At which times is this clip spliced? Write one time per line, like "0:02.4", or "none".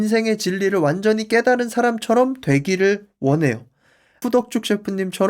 0:04.2